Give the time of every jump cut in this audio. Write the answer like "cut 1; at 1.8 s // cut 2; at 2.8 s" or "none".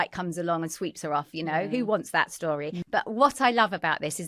cut 1; at 2.8 s